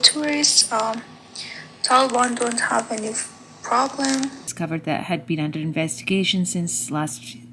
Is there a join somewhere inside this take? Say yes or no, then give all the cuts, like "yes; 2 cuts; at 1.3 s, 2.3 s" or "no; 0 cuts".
yes; 1 cut; at 4.5 s